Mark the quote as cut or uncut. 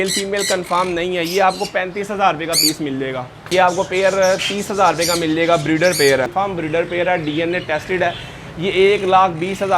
cut